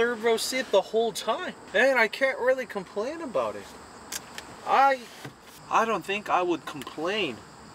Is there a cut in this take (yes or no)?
no